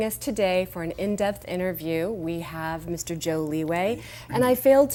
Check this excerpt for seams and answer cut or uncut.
uncut